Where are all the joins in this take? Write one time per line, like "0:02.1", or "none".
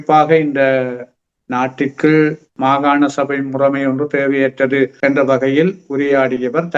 0:02.5
0:04.9